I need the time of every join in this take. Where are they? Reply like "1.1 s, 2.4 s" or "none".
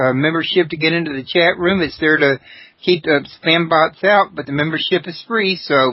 0.9 s